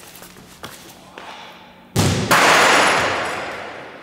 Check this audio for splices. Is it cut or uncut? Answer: uncut